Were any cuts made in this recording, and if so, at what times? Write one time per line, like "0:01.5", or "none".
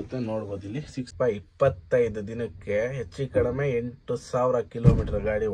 0:01.1